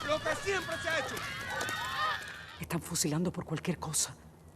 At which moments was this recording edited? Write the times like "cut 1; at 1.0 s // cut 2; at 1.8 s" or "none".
cut 1; at 2.3 s